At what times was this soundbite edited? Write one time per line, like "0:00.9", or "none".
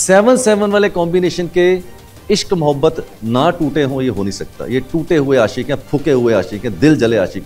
none